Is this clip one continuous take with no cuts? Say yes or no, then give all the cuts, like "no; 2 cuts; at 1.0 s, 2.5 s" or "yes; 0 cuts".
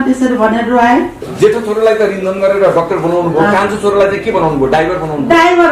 no; 1 cut; at 1.2 s